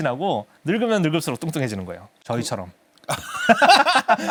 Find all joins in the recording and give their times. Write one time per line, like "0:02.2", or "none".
none